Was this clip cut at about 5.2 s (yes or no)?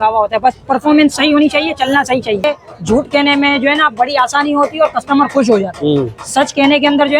no